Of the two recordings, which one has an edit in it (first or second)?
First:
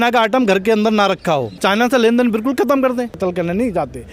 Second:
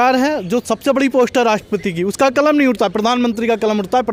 first